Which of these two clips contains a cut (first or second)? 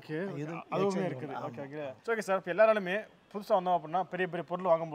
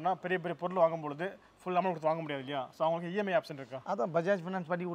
first